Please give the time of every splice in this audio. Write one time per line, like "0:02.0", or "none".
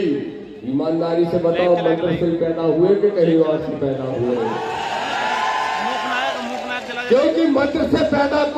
none